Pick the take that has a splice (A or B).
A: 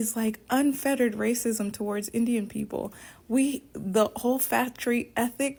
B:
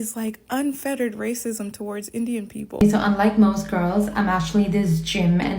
B